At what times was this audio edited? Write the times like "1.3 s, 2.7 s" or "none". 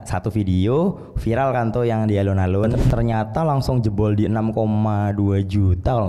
2.8 s